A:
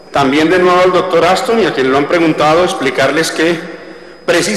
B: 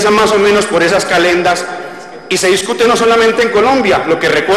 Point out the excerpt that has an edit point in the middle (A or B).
A